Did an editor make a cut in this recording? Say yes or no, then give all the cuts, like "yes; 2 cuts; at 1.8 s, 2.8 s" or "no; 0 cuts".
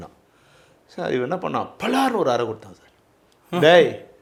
no; 0 cuts